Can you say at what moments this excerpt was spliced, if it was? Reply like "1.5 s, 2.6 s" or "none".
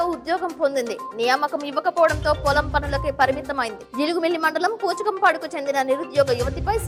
none